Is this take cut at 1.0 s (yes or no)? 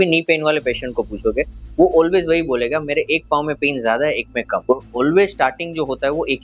no